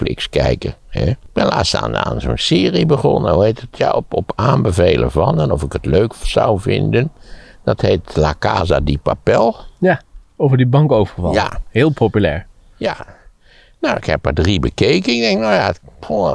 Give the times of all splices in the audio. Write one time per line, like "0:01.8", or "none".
0:01.2